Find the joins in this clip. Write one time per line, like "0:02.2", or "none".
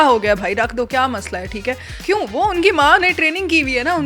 0:02.0